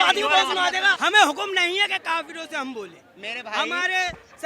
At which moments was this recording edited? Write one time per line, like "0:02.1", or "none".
0:00.9